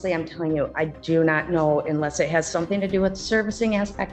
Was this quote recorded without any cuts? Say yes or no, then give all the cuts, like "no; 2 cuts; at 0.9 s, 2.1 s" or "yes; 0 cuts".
yes; 0 cuts